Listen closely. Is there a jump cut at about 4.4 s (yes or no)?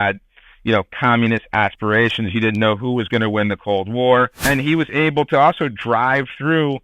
yes